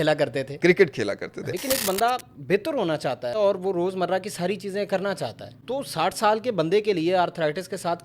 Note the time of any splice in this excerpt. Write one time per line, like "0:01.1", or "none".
0:01.4
0:03.3
0:05.5